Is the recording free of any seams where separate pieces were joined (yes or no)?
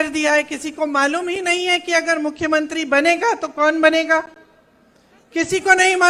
yes